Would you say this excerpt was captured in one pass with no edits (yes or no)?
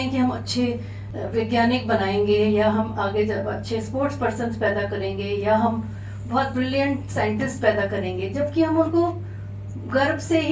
no